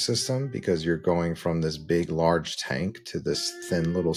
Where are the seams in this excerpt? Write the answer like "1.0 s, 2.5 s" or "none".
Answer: none